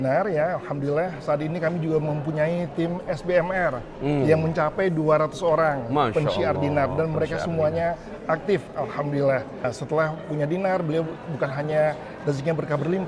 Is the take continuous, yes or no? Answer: no